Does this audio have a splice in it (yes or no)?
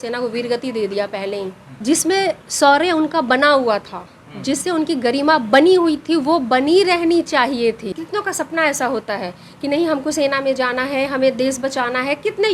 yes